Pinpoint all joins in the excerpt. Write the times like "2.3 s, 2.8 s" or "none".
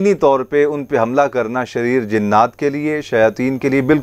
none